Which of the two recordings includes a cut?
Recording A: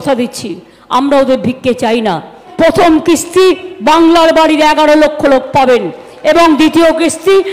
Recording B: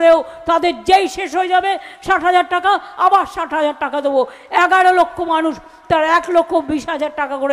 A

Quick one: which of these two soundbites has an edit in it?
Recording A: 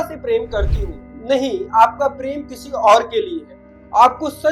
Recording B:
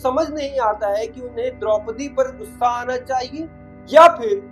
A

